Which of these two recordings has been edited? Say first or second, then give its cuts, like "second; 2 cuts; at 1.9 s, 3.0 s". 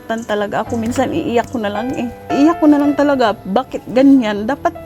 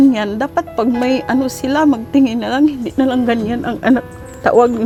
first; 1 cut; at 2.3 s